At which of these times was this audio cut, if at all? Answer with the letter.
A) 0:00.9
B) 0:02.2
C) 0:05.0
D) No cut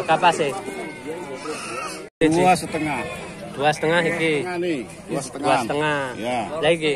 B